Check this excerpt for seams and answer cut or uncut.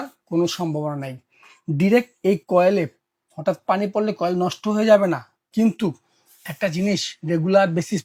uncut